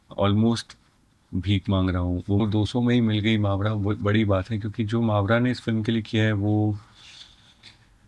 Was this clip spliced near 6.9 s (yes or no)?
no